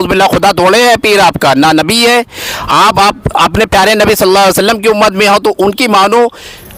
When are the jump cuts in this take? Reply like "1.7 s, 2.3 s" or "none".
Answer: none